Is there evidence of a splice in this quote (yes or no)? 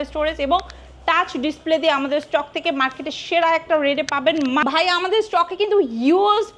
yes